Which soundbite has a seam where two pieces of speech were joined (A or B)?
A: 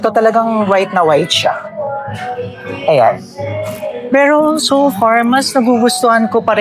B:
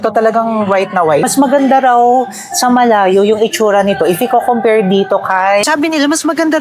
B